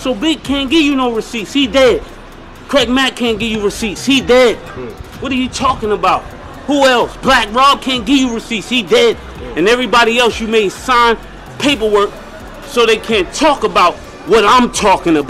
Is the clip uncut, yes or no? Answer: yes